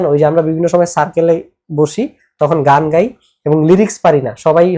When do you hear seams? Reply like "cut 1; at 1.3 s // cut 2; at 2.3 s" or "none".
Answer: none